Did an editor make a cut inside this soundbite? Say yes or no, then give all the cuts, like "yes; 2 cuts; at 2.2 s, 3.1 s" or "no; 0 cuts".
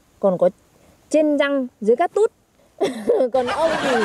no; 0 cuts